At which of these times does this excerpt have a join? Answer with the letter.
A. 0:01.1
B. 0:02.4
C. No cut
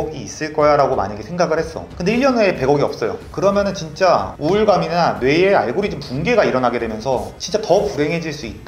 C